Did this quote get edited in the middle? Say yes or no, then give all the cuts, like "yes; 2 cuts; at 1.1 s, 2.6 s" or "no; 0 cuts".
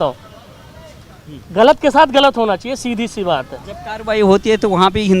no; 0 cuts